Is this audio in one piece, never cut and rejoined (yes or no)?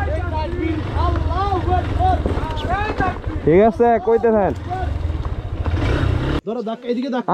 no